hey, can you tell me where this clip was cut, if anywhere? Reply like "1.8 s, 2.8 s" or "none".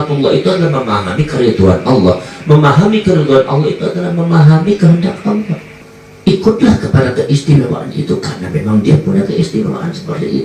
5.6 s